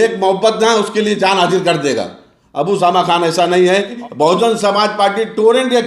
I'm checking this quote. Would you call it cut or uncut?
cut